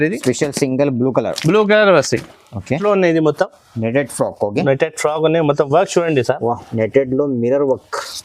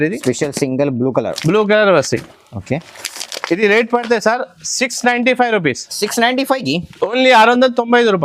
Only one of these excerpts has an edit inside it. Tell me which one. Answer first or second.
first